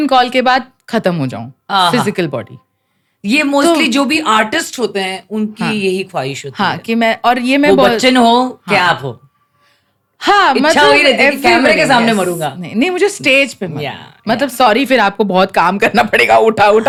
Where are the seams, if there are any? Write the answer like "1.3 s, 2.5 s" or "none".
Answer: none